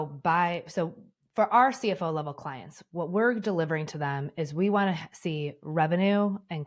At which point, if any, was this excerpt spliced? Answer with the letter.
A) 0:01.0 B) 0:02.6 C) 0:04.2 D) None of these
D